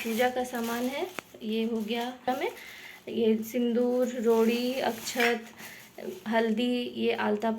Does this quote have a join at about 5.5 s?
no; 1 cut; at 2.2 s

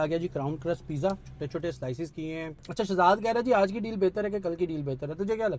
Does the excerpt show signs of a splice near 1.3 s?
yes; 2 cuts; at 1.3 s, 2.6 s

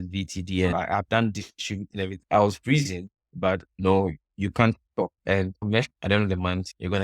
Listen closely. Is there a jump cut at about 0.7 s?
yes; 3 cuts; at 0.7 s, 2.2 s, 5.9 s

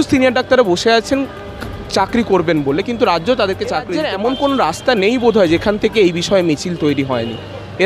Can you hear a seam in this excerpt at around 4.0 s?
yes; 1 cut; at 4.0 s

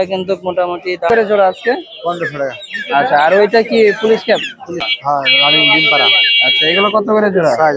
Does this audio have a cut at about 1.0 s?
yes; 2 cuts; at 1.0 s, 4.9 s

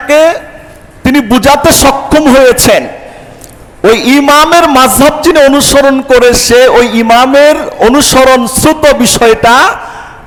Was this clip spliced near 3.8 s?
no; 0 cuts

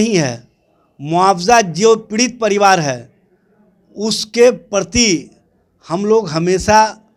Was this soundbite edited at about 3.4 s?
no; 0 cuts

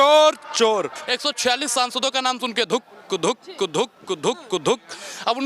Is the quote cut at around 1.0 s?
yes; 1 cut; at 1.0 s

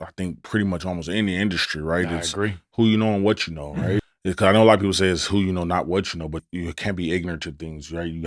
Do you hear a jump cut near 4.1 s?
yes; 2 cuts; at 4.1 s, 6.4 s

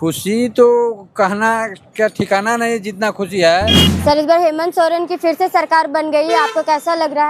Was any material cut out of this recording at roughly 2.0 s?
no; 1 cut; at 3.9 s

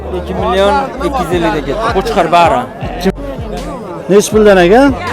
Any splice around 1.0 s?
no; 1 cut; at 3.1 s

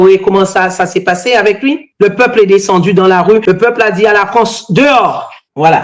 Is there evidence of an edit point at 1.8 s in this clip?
no; 1 cut; at 3.4 s

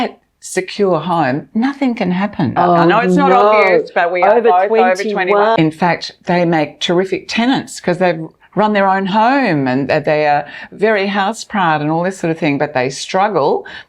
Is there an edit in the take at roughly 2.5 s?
yes; 2 cuts; at 2.5 s, 5.6 s

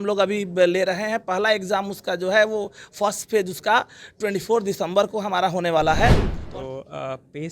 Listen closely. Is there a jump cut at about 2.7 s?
no; 1 cut; at 6.3 s

